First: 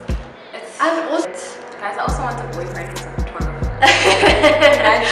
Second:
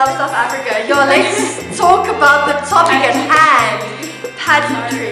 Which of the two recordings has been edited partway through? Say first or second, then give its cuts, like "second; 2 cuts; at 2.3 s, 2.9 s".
first; 1 cut; at 1.2 s